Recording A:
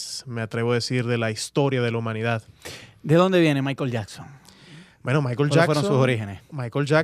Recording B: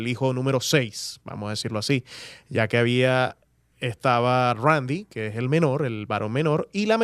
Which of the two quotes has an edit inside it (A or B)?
A